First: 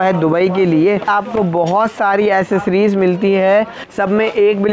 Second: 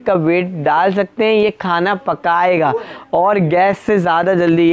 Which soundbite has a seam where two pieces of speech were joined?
first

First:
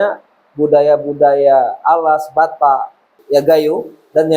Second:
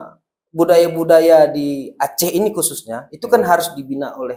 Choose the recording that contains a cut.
first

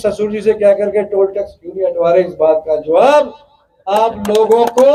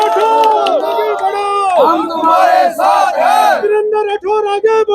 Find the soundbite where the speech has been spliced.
second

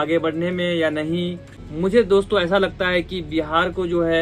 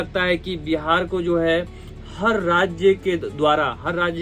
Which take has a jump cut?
first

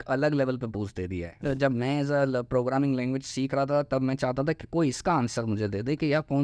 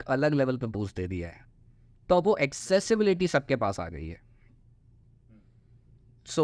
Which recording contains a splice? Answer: first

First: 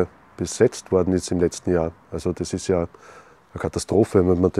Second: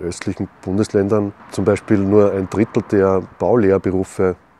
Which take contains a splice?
second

